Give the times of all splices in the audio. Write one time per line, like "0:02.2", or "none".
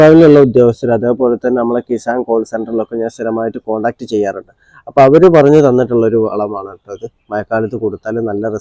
none